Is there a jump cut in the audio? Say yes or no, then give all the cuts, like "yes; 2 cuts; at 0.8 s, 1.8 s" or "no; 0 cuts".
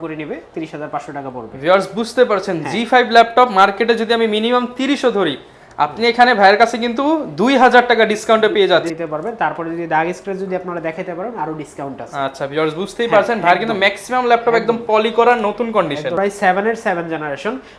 yes; 2 cuts; at 8.9 s, 16.2 s